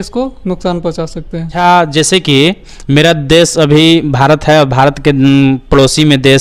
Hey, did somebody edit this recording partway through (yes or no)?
yes